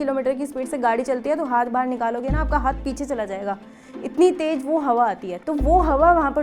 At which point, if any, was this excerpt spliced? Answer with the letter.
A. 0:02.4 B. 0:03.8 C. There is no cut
C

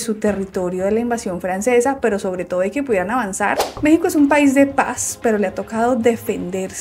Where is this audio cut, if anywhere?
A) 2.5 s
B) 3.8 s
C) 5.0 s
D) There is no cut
B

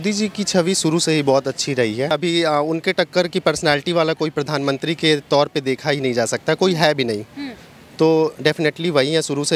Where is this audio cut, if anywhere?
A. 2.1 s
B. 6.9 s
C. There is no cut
A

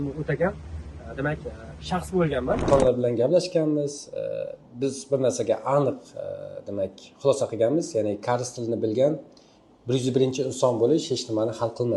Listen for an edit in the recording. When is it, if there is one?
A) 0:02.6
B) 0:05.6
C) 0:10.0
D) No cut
A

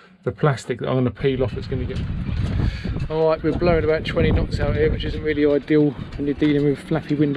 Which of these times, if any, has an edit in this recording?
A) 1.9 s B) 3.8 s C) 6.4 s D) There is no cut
A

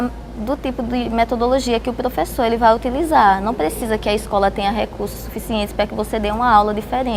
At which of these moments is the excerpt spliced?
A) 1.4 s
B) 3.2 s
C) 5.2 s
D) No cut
D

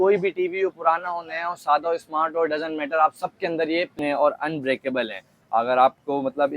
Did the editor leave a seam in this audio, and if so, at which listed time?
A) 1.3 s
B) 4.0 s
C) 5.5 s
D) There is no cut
B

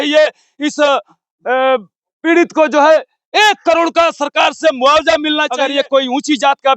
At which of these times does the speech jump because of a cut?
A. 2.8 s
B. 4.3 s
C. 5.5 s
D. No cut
C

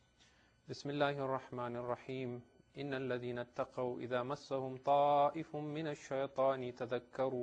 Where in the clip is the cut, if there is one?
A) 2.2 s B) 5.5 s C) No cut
B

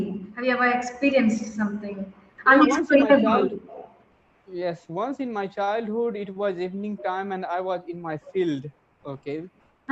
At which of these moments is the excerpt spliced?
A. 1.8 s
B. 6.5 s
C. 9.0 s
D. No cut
D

